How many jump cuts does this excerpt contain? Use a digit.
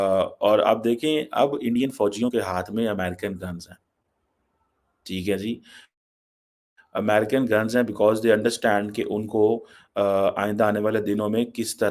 0